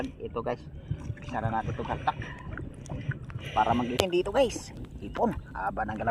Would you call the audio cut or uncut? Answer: cut